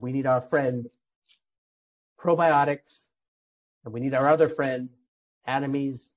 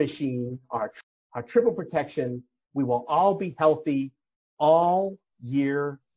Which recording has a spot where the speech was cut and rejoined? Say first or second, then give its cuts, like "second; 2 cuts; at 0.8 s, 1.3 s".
second; 1 cut; at 0.9 s